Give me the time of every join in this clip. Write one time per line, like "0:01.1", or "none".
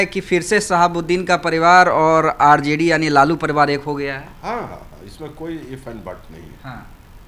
none